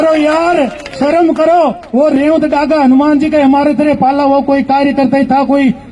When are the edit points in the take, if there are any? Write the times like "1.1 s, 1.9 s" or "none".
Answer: none